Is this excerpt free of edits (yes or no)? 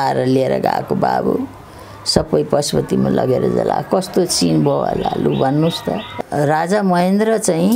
no